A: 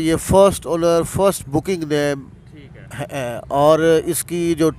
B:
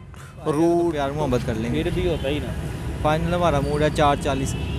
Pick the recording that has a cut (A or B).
B